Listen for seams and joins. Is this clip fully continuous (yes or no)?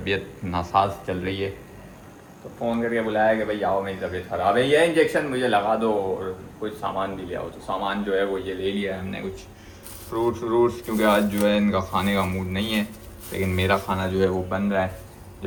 yes